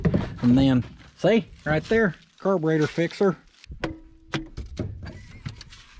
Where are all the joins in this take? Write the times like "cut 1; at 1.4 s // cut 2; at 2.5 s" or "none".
cut 1; at 3.5 s